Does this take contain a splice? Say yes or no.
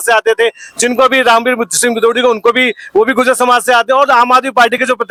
no